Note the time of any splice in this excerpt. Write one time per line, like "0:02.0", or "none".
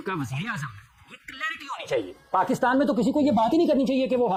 none